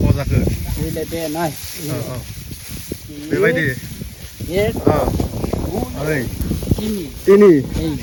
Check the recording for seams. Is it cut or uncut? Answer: uncut